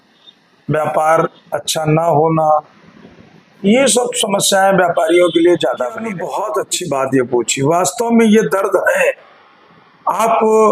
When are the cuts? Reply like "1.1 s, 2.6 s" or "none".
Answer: 6.2 s